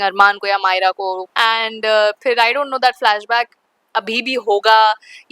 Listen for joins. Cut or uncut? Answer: cut